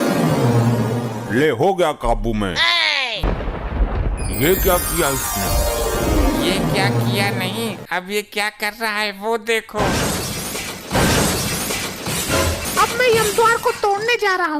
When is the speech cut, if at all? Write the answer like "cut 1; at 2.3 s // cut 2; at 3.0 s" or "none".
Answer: cut 1; at 3.2 s // cut 2; at 12.6 s